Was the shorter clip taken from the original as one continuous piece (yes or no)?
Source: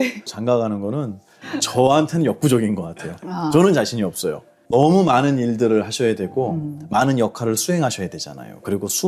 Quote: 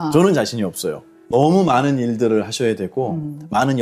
yes